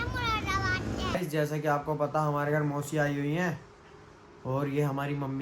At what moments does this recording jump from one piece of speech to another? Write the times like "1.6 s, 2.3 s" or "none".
1.1 s